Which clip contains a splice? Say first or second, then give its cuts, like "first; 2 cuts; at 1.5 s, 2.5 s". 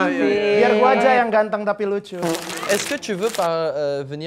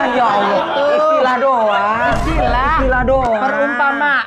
first; 1 cut; at 2.2 s